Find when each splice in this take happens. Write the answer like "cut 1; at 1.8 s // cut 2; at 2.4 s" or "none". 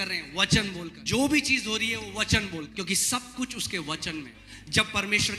cut 1; at 0.9 s // cut 2; at 2.7 s // cut 3; at 4.4 s